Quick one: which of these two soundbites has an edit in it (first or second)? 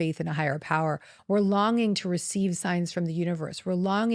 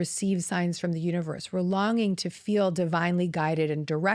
first